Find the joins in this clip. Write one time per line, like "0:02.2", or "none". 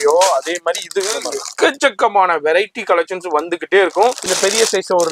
0:04.2

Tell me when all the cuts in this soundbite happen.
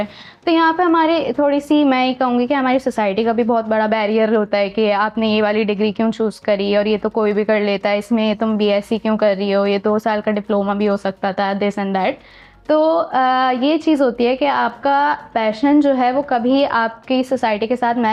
none

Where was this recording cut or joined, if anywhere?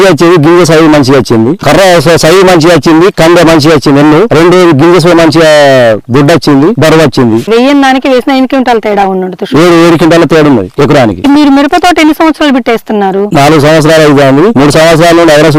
none

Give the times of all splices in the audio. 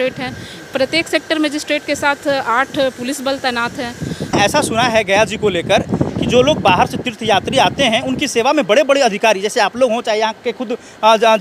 0:04.3

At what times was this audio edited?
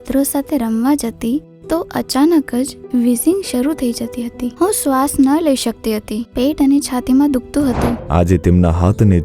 0:08.0

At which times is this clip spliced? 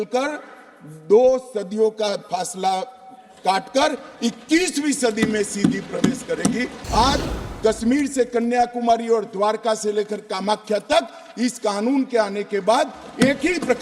0:06.7

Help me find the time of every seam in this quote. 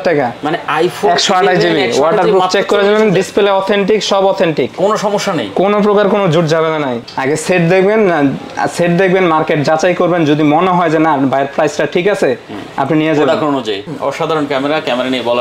0:06.9
0:13.9

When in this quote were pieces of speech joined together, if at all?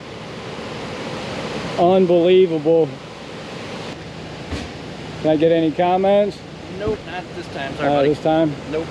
0:03.9

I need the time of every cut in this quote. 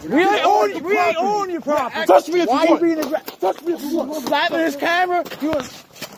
0:01.9

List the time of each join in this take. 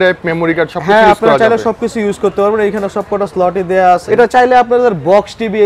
0:04.0

